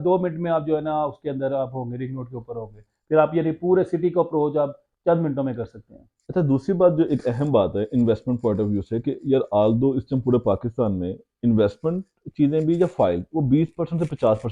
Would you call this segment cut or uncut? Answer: uncut